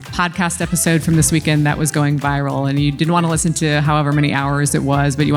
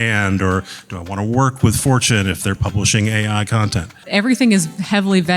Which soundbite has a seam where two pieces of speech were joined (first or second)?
second